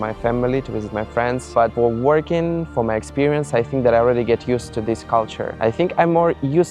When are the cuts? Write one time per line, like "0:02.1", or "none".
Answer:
0:01.6
0:05.4